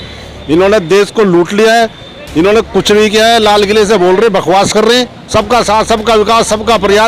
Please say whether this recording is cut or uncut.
cut